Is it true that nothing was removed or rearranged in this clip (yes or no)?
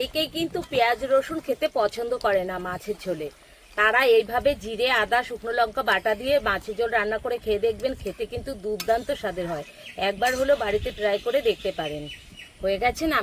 yes